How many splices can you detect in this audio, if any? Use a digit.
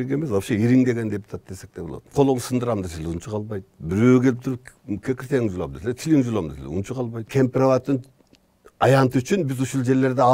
2